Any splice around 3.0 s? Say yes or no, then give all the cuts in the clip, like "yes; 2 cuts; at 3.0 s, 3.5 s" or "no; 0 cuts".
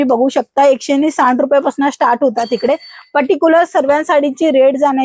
no; 0 cuts